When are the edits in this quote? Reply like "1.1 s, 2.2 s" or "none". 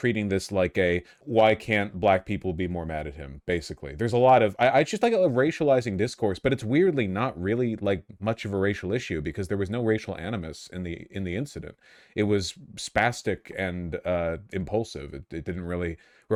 none